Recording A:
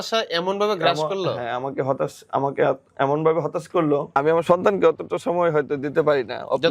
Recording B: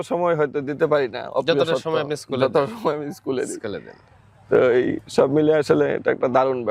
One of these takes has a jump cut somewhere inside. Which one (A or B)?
A